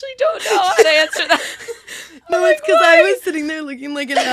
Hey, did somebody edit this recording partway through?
yes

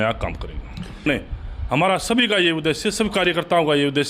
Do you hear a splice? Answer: yes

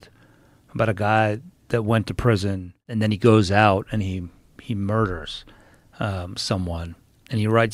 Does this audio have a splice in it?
yes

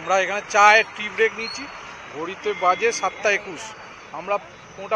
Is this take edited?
no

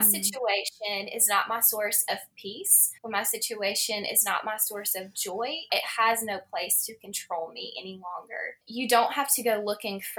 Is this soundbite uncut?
no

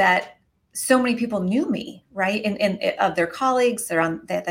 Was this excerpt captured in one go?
yes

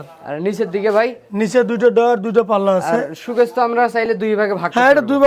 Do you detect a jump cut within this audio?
no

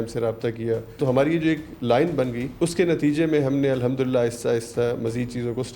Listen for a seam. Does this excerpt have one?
yes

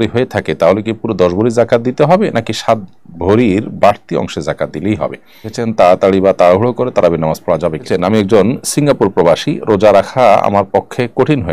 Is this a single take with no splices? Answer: no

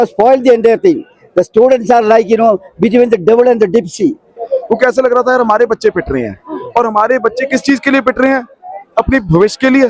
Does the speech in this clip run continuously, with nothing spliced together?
no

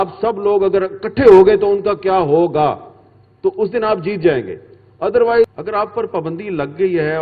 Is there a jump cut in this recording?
yes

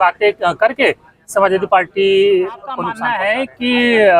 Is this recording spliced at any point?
yes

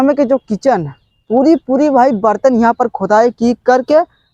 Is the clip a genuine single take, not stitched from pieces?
yes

